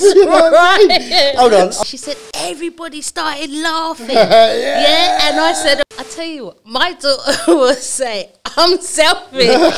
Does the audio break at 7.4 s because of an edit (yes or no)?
no